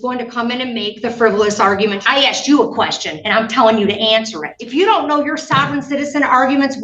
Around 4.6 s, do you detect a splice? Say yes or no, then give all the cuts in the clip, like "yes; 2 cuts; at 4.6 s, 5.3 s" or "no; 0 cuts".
yes; 2 cuts; at 2.0 s, 4.6 s